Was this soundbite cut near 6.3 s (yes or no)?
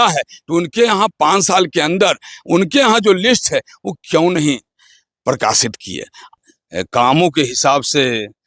yes